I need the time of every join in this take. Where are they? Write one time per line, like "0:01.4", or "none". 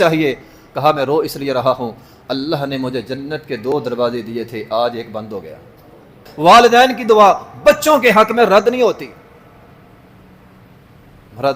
0:06.3